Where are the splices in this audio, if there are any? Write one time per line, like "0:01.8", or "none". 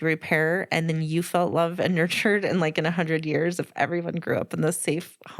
none